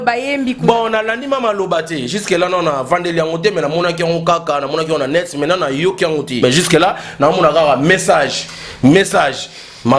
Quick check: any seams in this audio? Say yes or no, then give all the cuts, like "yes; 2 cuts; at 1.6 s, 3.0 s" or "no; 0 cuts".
yes; 1 cut; at 6.4 s